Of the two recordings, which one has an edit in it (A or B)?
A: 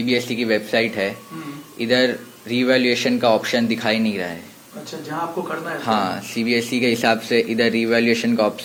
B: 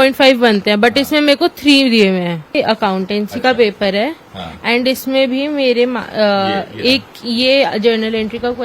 B